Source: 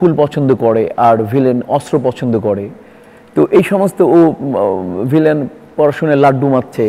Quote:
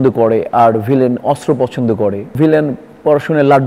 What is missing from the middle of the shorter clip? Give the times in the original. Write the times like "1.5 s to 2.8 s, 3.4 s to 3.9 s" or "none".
2.7 s to 5.0 s

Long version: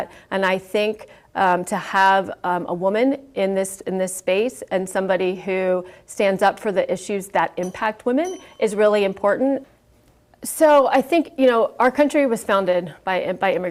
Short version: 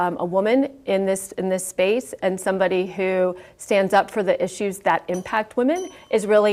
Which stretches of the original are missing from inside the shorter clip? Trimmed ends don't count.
none

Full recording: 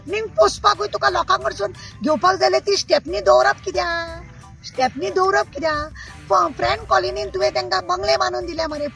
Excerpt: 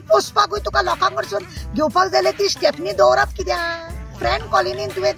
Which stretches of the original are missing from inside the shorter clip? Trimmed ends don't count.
4.4 s to 6.5 s

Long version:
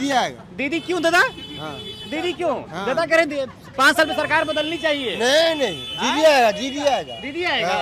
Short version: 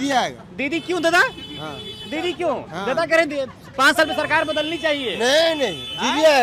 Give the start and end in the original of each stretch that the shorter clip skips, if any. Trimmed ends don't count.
none

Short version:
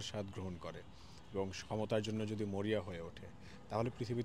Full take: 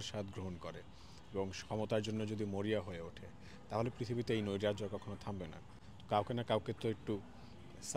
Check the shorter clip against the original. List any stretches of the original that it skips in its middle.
none

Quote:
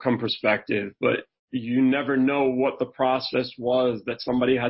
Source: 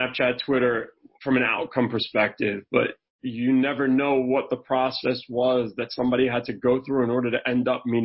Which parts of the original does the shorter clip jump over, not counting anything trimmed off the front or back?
none

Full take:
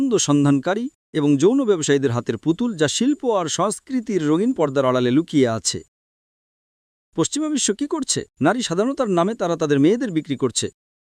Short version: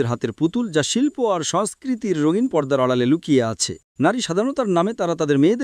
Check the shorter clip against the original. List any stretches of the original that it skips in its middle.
5.9 s to 8.2 s

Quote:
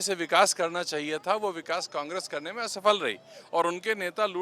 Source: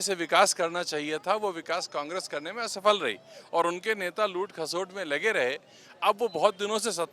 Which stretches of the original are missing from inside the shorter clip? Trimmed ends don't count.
none

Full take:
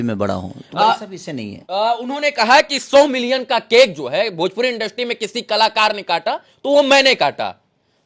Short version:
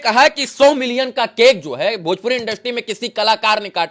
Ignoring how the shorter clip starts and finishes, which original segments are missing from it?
none

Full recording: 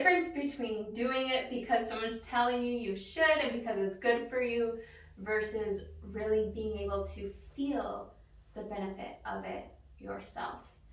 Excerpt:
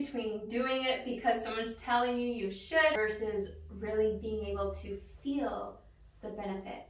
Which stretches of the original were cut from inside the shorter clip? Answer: 3.4 s to 5.3 s

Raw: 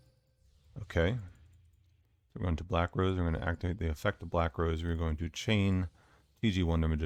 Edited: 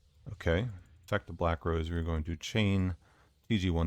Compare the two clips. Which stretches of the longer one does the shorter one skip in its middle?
1.5 s to 4.0 s

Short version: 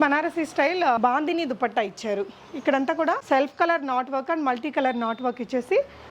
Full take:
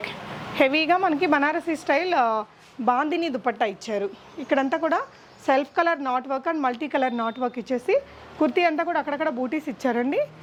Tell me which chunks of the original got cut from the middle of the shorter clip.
2.3 s to 2.8 s, 5.1 s to 5.4 s

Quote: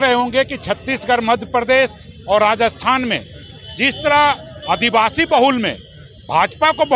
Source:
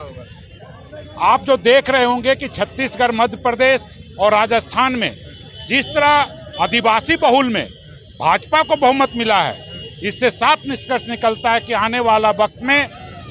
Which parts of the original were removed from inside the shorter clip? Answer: none

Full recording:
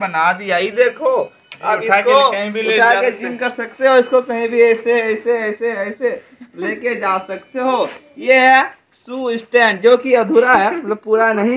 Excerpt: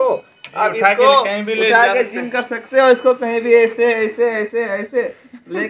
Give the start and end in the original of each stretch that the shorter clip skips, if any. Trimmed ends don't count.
none

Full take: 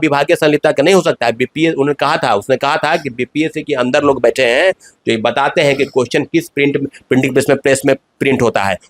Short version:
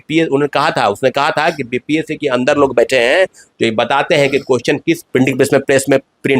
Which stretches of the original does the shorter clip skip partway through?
6.5 s to 7.0 s

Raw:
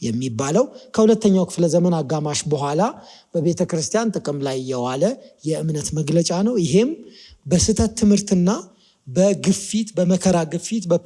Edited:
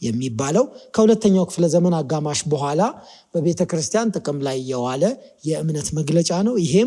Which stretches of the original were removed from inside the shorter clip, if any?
none

